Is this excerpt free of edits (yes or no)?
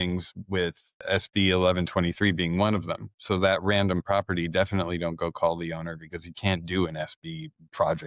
yes